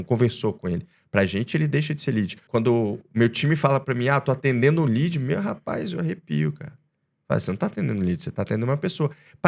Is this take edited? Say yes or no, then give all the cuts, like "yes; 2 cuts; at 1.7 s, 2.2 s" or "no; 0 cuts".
yes; 1 cut; at 2.4 s